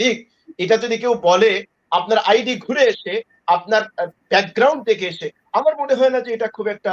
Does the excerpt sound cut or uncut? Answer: uncut